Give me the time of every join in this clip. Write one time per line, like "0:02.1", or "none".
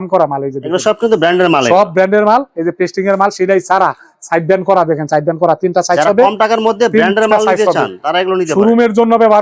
none